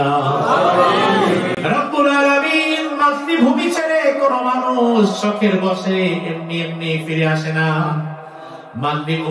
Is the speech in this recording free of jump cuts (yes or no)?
yes